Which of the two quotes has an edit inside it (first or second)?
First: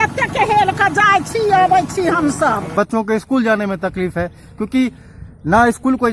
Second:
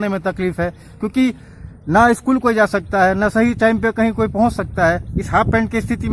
first